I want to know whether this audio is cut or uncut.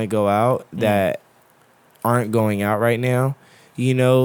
uncut